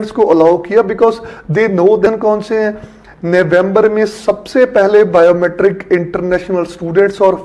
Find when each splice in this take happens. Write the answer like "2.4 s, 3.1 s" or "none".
2.1 s

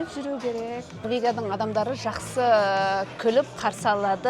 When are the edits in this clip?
1.0 s

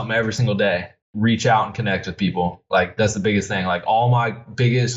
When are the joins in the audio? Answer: 0.9 s

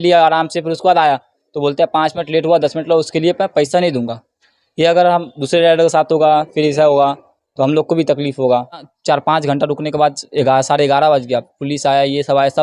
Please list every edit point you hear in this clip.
8.9 s

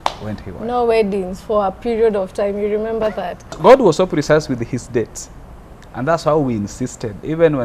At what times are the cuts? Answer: 3.5 s

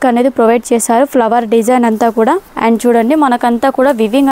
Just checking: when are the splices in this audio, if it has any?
2.5 s

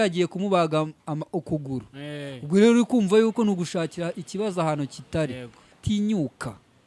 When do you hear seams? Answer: 5.8 s

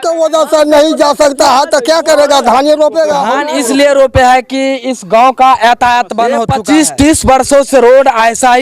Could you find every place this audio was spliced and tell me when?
3.4 s, 6.5 s

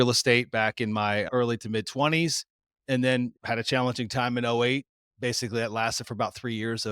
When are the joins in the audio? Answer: none

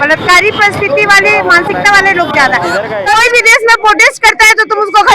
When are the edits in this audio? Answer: 2.9 s

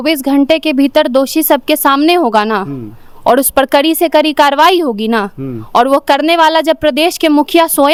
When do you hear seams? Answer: none

